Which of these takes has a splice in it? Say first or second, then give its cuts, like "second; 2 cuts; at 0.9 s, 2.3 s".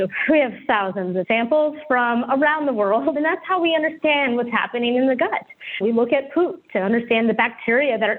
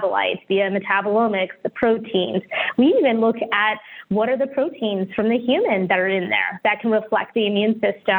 first; 2 cuts; at 1.2 s, 3.1 s